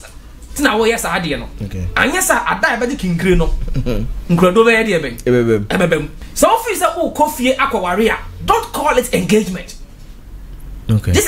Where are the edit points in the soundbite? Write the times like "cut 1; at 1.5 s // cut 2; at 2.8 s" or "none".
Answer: cut 1; at 6.2 s